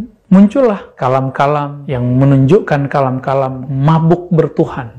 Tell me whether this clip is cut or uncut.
cut